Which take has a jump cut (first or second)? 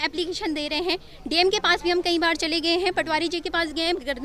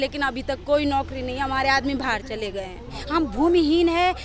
second